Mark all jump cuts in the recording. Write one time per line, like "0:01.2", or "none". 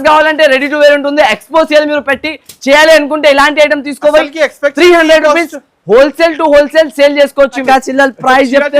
0:07.6